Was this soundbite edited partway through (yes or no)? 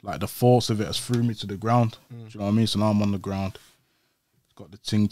no